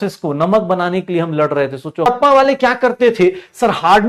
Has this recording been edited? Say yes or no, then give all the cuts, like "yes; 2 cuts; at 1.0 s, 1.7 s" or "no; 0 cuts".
yes; 1 cut; at 2.1 s